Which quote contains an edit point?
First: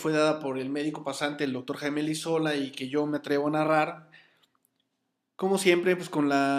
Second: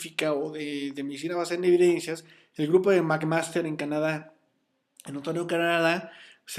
first; 1 cut; at 4.4 s

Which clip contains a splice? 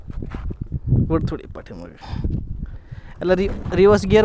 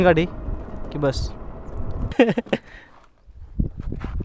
second; 1 cut; at 2.1 s

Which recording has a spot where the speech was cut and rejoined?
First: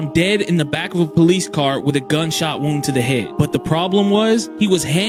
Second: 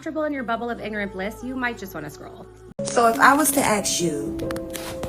second; 1 cut; at 2.6 s

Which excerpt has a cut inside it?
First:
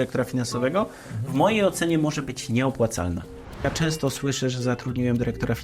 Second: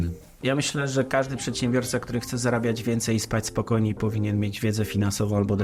first; 1 cut; at 3.6 s

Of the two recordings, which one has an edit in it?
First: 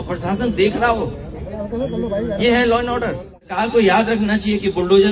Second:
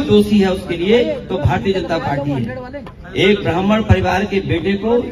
first; 1 cut; at 3.5 s

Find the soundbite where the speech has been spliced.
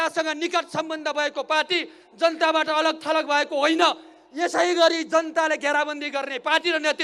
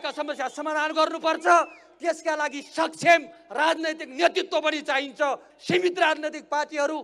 second; 1 cut; at 5.5 s

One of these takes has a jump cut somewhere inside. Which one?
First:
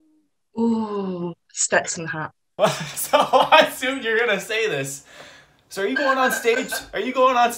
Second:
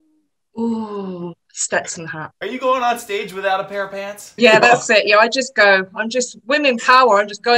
second; 2 cuts; at 2.3 s, 4.3 s

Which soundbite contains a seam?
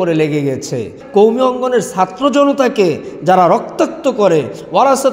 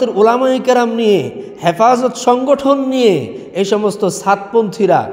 first; 1 cut; at 0.9 s

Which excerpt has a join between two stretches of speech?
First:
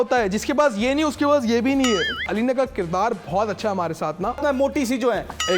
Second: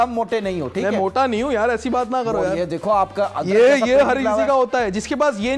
first; 2 cuts; at 2.3 s, 4.4 s

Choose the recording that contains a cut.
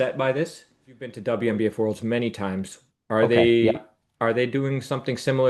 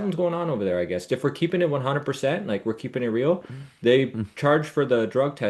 first; 1 cut; at 1.2 s

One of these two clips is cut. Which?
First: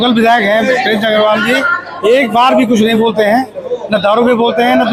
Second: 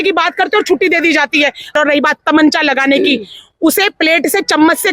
second; 1 cut; at 1.7 s

